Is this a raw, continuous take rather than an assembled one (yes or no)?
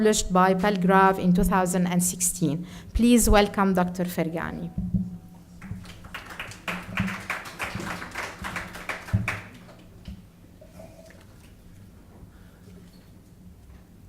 no